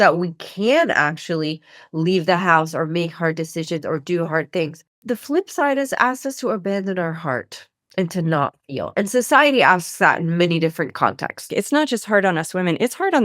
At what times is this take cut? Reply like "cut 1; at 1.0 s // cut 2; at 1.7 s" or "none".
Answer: cut 1; at 11.5 s